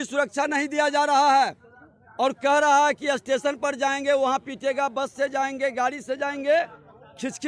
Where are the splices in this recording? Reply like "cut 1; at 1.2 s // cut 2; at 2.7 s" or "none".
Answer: none